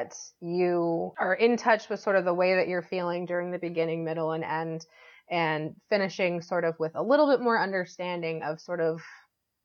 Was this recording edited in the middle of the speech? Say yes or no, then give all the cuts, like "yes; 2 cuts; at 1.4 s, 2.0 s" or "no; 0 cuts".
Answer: yes; 1 cut; at 1.1 s